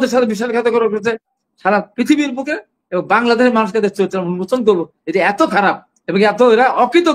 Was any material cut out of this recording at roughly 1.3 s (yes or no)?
yes